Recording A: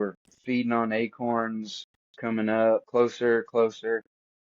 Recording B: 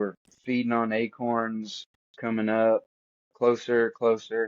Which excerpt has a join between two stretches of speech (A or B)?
A